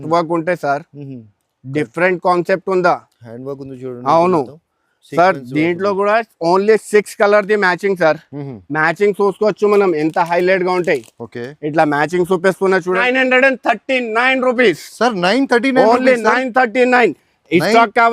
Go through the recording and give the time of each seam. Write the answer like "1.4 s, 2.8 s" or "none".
13.0 s